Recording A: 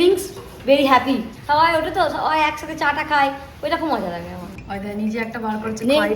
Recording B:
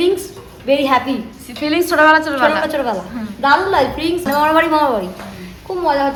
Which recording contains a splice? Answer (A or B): A